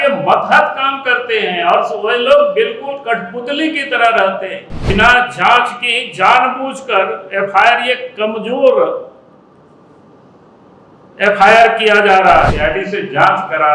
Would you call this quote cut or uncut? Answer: cut